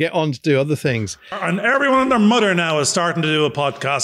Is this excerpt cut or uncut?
cut